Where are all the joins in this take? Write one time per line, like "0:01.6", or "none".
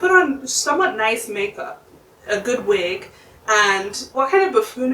0:04.0